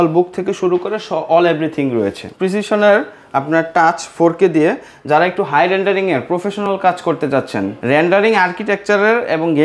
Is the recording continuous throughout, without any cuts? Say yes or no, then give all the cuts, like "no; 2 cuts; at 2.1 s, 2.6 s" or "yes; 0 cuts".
no; 2 cuts; at 2.2 s, 7.8 s